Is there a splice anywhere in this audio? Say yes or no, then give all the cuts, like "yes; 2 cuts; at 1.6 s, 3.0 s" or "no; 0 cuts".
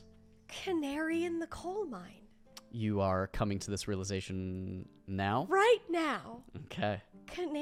no; 0 cuts